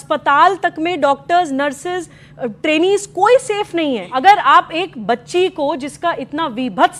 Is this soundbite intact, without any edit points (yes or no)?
no